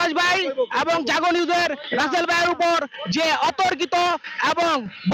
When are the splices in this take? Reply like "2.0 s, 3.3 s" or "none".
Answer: none